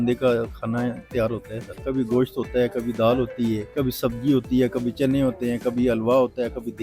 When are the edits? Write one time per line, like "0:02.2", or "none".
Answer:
0:01.8
0:03.7